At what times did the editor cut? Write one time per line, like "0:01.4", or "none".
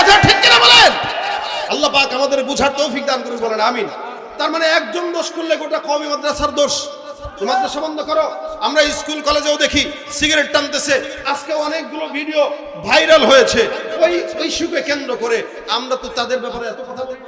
none

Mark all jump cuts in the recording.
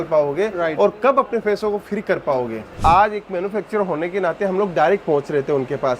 0:02.8

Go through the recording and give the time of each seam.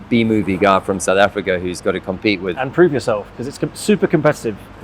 none

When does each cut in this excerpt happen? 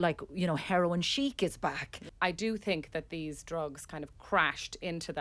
0:02.0

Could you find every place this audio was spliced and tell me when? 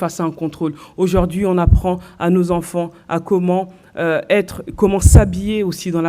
0:01.7

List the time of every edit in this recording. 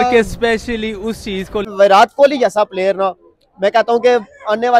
0:01.7

